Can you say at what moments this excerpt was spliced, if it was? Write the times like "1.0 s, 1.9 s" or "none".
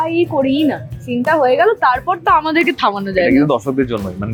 none